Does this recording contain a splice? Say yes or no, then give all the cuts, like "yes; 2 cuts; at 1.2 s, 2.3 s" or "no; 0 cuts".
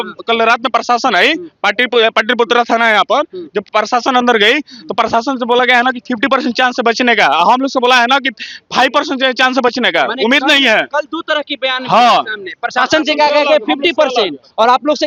no; 0 cuts